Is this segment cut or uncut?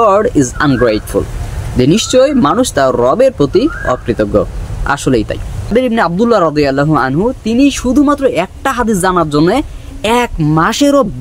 cut